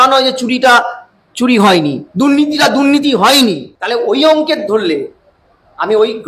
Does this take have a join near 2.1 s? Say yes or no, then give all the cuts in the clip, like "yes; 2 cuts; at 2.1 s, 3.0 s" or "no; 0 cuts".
no; 1 cut; at 3.7 s